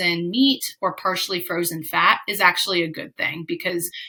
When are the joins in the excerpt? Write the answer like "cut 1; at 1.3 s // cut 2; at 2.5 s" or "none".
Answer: none